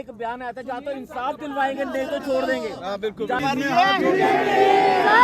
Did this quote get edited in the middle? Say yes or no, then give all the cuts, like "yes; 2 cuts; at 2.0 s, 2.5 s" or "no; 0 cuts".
yes; 1 cut; at 3.4 s